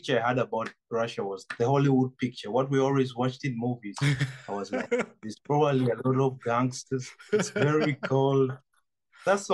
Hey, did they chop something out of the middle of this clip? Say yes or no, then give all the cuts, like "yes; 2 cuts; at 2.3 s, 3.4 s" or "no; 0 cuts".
no; 0 cuts